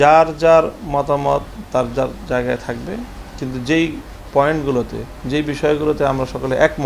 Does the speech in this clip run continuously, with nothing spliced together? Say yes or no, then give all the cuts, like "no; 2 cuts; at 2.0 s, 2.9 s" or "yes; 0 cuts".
yes; 0 cuts